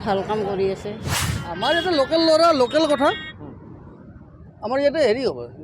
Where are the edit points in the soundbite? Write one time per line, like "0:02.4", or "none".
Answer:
0:01.1

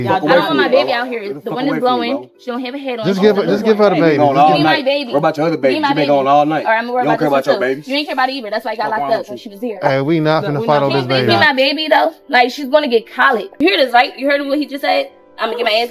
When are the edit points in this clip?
0:13.5

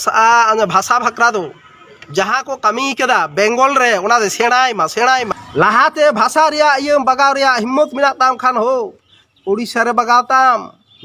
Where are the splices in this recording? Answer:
0:05.3

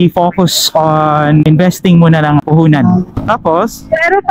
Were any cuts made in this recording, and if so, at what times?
0:01.4
0:02.4
0:03.2

